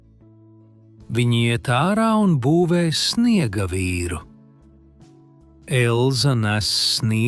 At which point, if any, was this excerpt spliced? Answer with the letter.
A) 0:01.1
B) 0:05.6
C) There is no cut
A